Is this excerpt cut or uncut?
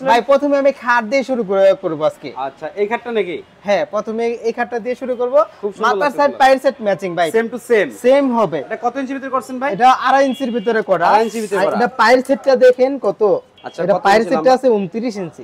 uncut